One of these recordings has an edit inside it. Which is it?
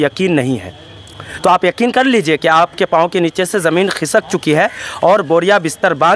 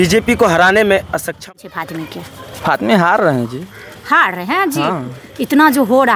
second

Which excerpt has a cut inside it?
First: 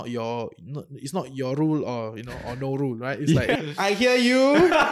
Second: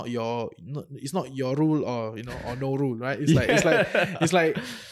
first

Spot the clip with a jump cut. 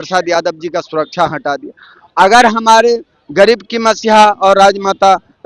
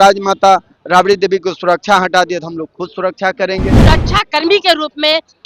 second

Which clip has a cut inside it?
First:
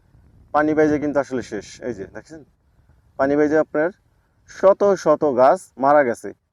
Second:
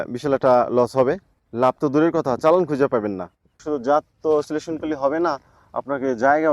second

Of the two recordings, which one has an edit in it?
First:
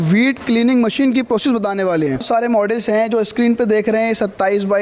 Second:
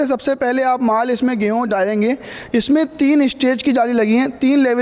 first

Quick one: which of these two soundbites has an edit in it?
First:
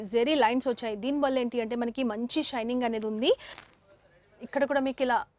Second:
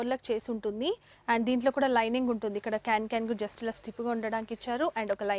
first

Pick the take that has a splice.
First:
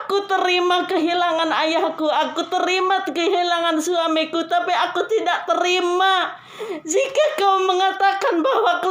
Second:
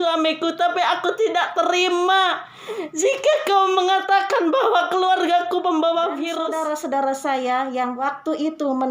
second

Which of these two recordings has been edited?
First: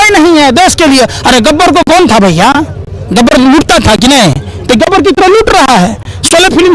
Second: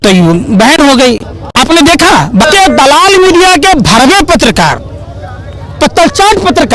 second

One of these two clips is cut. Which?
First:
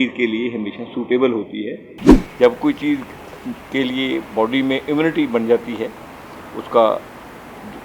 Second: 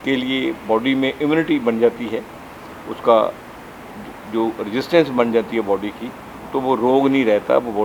first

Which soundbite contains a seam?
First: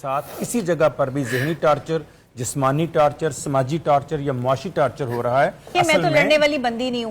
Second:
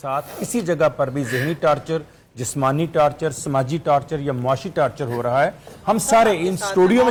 first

